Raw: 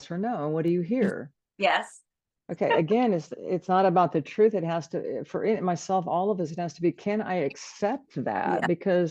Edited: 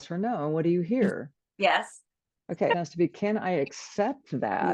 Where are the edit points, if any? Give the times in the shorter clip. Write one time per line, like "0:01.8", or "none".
0:02.7